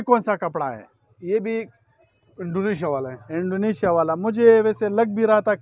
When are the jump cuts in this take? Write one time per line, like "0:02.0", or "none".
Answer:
none